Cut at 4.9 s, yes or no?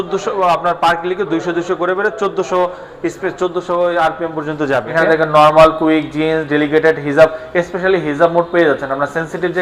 yes